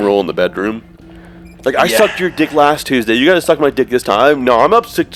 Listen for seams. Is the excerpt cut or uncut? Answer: uncut